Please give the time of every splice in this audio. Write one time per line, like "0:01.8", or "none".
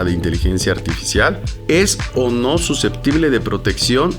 0:01.5